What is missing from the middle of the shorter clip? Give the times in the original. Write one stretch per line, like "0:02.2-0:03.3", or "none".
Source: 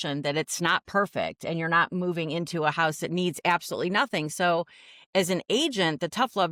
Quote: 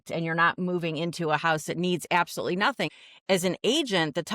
0:04.3-0:04.8